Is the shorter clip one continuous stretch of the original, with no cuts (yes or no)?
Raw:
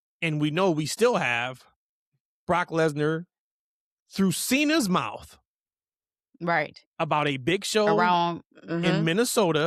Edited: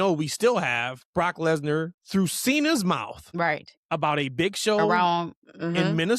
no